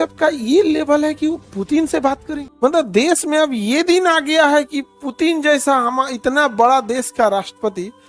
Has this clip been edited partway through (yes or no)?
yes